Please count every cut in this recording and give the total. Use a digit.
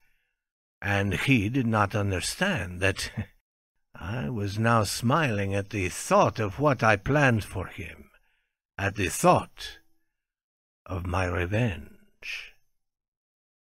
1